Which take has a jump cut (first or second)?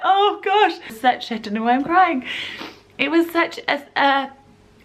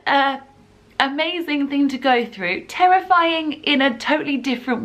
first